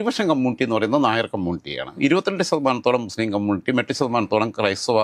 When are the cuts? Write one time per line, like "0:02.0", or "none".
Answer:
none